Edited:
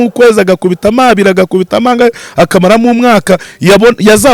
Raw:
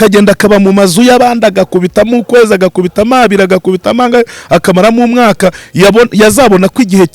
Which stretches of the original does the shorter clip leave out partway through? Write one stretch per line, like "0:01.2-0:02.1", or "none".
none

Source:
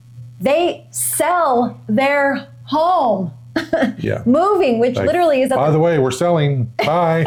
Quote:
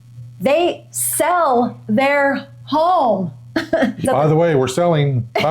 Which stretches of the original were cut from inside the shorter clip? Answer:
0:04.1-0:05.5

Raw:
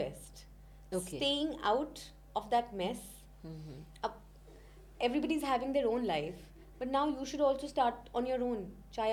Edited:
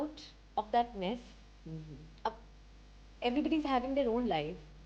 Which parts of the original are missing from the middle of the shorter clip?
none

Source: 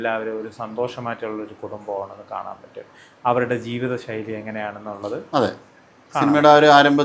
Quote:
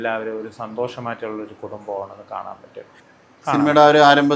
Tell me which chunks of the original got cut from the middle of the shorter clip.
0:03.0-0:05.7

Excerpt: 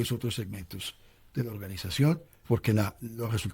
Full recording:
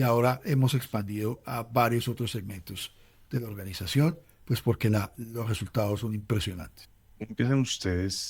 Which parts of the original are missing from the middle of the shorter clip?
0:04.4-0:04.6

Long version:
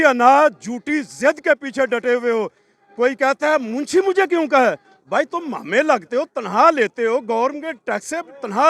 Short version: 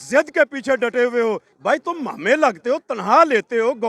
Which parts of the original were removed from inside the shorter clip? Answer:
0:02.6-0:05.0

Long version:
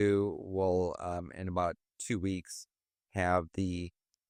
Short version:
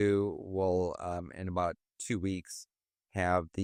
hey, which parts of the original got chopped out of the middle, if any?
none

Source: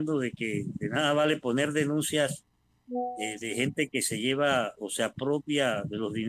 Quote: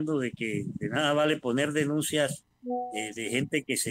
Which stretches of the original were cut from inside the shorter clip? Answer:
0:02.5-0:02.7

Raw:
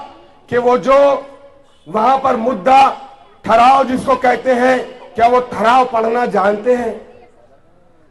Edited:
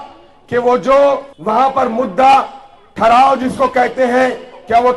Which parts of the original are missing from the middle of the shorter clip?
0:01.3-0:01.8

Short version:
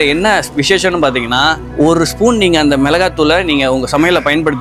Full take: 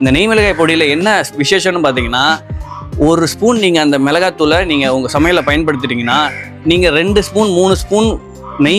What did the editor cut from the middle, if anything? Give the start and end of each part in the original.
0:02.5-0:02.9

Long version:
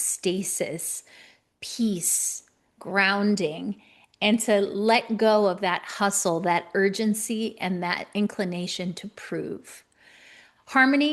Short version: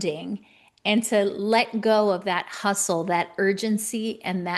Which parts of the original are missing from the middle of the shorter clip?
none

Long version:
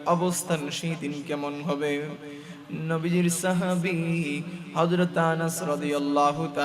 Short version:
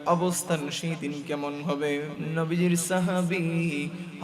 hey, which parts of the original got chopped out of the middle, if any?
0:02.2-0:02.7

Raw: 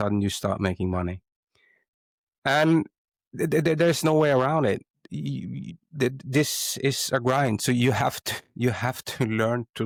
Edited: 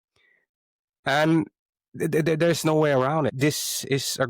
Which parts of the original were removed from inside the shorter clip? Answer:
0:04.7-0:06.2

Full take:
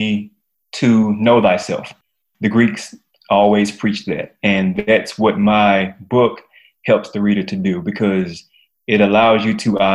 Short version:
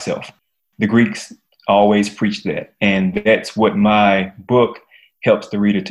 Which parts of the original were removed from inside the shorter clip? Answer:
none

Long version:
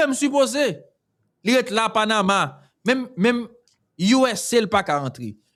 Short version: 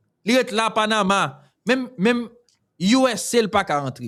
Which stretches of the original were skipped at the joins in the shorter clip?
none

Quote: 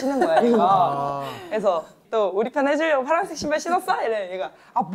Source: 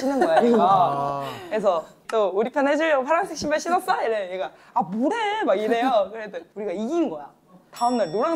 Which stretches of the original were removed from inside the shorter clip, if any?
none

